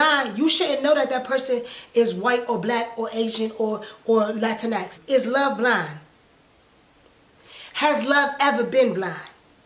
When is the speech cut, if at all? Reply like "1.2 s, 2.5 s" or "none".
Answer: 4.9 s